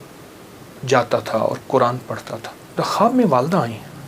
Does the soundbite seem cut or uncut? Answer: cut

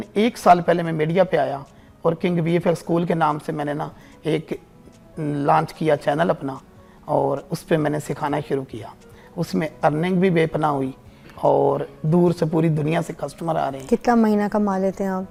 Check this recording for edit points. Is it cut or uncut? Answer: uncut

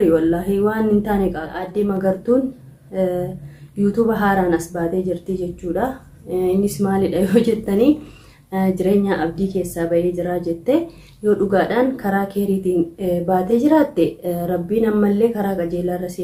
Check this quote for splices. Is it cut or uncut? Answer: cut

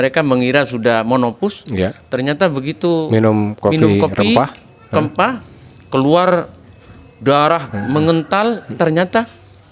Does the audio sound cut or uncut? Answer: cut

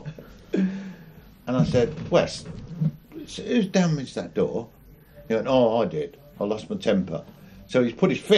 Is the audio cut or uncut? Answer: uncut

